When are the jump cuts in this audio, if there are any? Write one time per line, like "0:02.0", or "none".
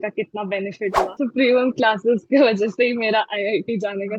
0:01.2

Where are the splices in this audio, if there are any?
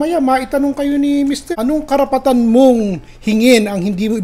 none

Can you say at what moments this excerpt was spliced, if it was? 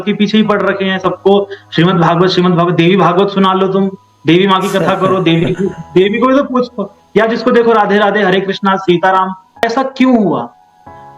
0:09.6

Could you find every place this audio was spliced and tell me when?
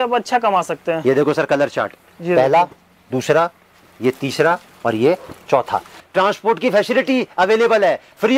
0:06.0

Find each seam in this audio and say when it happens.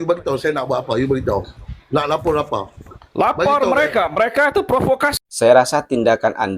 0:05.2

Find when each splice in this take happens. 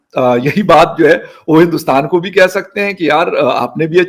none

